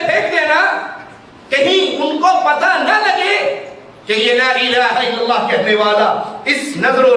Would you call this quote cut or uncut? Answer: uncut